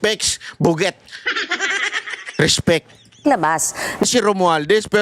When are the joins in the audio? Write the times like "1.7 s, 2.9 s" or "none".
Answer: 4.0 s

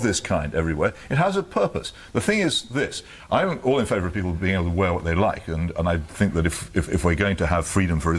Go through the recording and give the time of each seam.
none

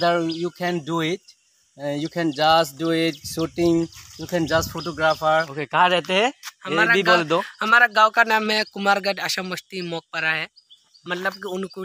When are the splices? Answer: 5.5 s

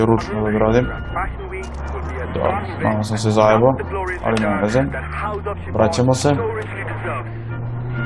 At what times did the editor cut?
none

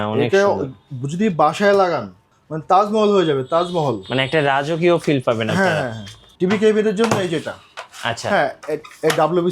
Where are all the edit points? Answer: 6.2 s

